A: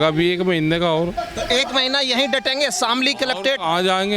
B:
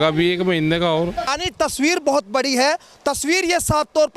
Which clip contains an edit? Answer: B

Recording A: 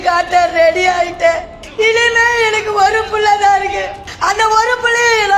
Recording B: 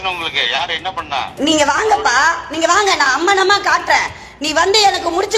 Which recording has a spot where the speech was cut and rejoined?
A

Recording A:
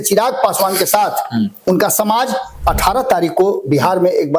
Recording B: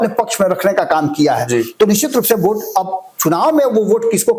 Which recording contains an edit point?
A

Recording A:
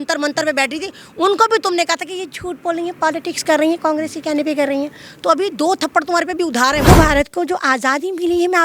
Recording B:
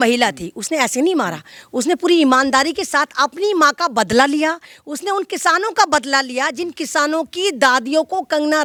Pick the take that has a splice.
A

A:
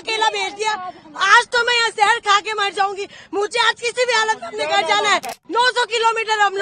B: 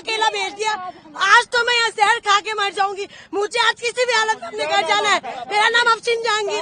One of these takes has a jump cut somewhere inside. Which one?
A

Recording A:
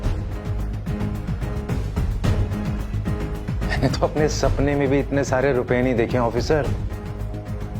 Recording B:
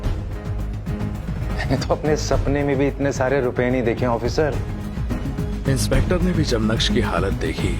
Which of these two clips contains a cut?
B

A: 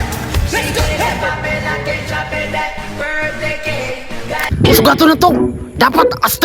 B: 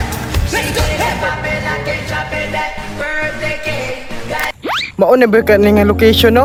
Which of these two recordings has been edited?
A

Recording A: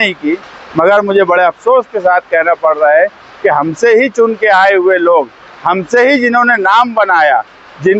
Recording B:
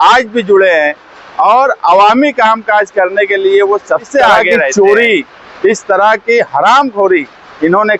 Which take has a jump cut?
B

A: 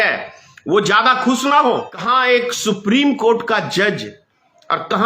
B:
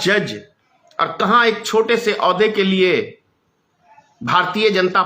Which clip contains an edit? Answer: A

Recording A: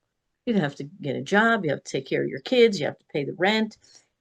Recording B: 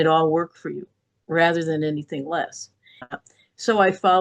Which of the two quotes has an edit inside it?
B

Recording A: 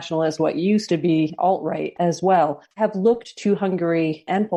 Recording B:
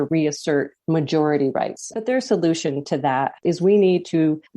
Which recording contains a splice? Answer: B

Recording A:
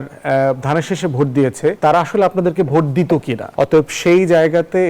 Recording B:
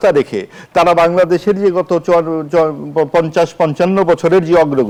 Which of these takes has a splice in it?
A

